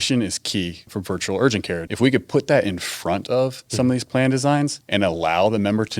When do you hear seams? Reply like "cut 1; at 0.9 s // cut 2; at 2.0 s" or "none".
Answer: cut 1; at 0.9 s // cut 2; at 1.9 s // cut 3; at 3.6 s // cut 4; at 4.8 s

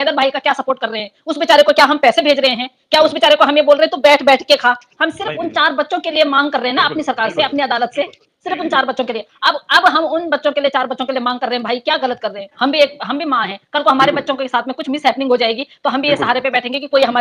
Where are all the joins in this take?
none

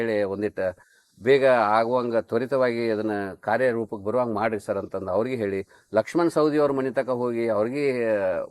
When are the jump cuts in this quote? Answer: none

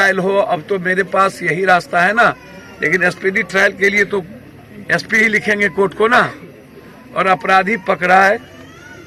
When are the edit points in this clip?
none

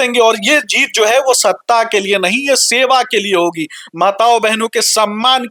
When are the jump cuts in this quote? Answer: none

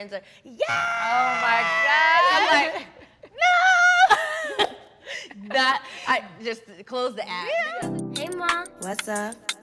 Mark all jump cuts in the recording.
cut 1; at 7.8 s

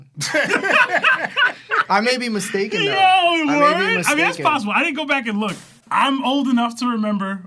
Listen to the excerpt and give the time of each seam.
cut 1; at 5.6 s

